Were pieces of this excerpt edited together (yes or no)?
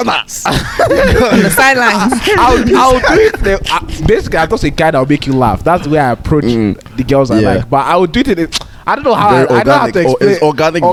no